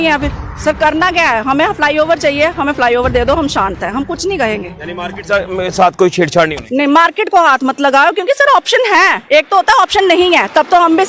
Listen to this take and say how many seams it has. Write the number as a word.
zero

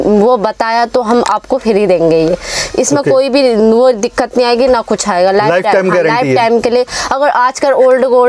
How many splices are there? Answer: zero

